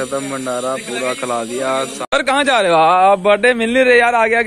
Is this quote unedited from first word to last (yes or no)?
no